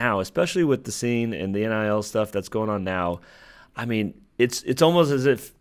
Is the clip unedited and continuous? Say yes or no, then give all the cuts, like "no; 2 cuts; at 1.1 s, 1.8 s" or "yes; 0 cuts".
yes; 0 cuts